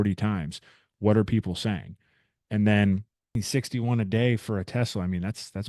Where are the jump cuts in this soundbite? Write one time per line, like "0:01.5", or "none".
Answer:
0:03.4